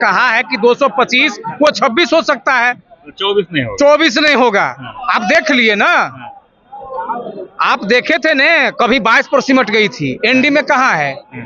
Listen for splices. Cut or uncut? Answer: uncut